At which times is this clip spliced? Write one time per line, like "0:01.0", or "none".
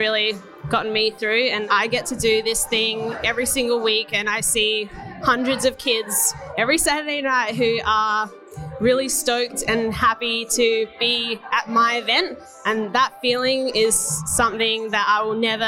0:01.6